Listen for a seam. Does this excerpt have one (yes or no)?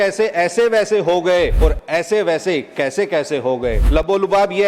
yes